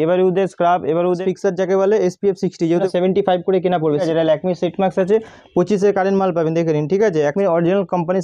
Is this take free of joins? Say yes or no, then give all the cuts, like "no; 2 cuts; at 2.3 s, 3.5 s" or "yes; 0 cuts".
no; 4 cuts; at 1.2 s, 2.9 s, 4.0 s, 7.3 s